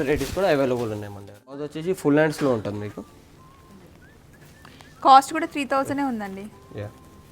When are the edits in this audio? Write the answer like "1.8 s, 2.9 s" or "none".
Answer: 1.7 s